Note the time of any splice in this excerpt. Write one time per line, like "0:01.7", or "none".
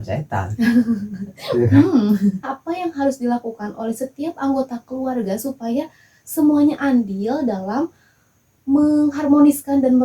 0:02.5